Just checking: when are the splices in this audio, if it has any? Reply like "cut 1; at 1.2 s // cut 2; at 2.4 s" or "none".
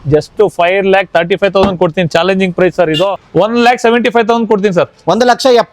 cut 1; at 3.2 s